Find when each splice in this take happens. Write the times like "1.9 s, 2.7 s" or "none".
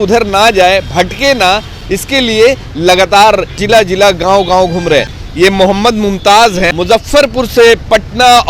3.6 s, 5.2 s, 6.8 s